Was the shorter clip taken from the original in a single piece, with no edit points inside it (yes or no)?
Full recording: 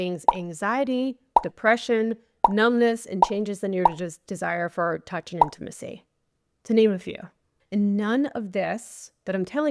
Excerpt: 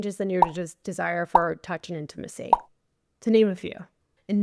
yes